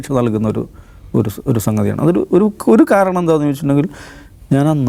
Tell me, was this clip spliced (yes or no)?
no